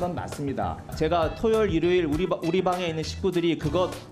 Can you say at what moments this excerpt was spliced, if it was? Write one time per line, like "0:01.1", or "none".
0:00.9